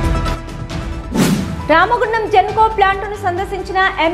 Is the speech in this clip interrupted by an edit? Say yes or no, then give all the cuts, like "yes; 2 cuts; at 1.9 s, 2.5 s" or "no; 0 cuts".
no; 0 cuts